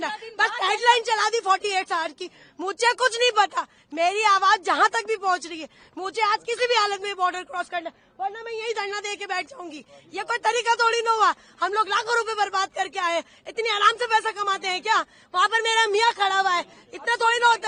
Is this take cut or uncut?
uncut